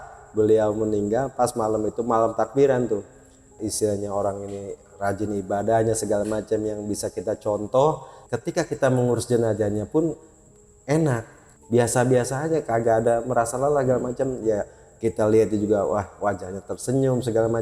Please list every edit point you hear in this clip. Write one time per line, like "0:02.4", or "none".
0:03.6
0:08.3
0:11.4